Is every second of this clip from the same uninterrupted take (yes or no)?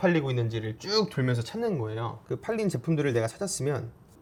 yes